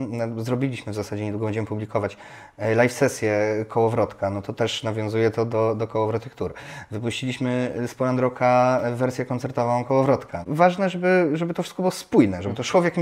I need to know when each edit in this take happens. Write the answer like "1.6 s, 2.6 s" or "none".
10.5 s